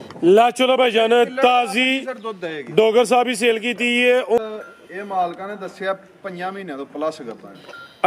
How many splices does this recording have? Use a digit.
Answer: 1